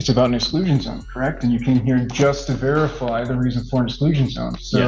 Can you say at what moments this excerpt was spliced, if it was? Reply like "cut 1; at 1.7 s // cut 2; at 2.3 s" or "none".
none